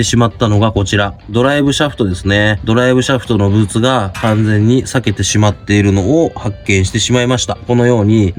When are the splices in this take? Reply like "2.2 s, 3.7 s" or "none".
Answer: none